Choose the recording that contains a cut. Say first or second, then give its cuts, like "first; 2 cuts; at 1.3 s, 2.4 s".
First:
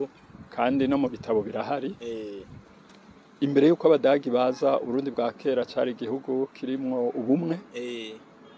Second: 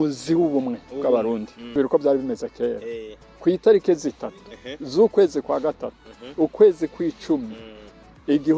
second; 1 cut; at 1.7 s